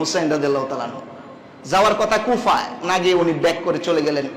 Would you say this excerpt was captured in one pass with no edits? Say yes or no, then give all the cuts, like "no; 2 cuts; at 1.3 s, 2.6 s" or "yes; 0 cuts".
yes; 0 cuts